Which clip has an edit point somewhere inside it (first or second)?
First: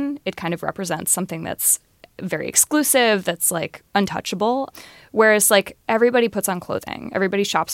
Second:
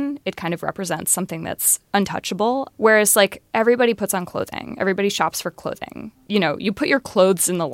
second